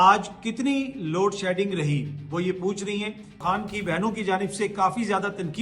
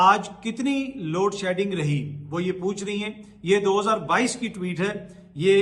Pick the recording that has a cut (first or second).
first